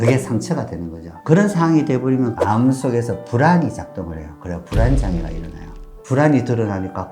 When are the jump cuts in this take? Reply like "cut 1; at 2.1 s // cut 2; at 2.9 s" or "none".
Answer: cut 1; at 2.4 s // cut 2; at 6.0 s